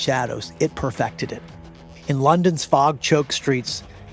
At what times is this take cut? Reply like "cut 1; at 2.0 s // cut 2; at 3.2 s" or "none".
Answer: none